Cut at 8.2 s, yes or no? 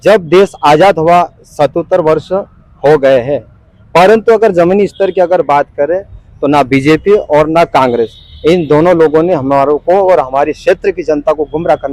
no